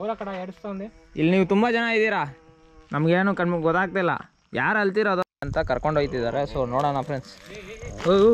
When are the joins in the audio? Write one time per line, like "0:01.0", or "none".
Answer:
0:05.4